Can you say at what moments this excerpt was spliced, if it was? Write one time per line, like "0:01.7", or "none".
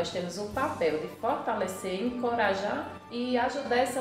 0:03.0

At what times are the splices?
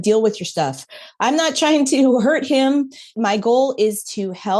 0:03.1

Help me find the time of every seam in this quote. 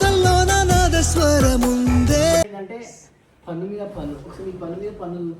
0:02.4

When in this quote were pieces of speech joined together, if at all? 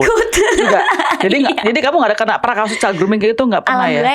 none

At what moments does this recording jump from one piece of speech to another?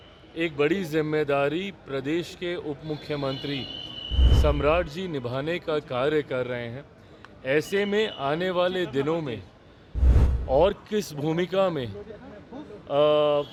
none

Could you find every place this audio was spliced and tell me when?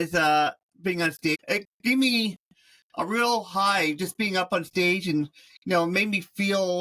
0:01.3

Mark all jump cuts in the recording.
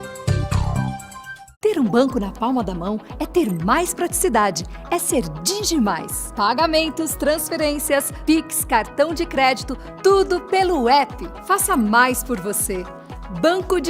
0:00.9

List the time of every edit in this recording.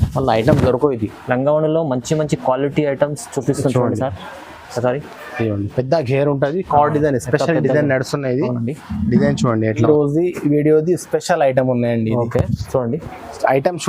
0:09.8

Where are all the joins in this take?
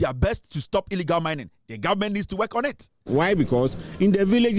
0:03.1

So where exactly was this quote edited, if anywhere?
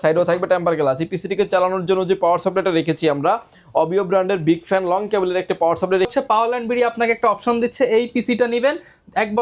0:06.1

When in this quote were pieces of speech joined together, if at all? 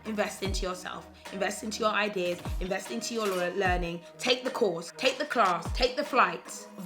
0:04.9
0:05.7

